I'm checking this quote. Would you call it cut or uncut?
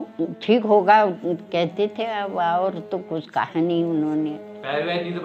uncut